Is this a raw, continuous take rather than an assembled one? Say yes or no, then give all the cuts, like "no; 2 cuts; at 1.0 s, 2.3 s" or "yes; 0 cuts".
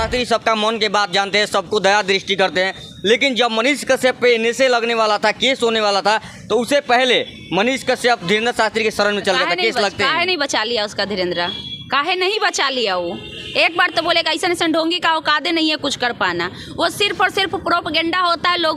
yes; 0 cuts